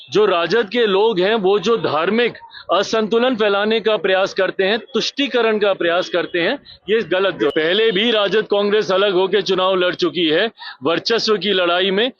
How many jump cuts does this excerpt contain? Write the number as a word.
one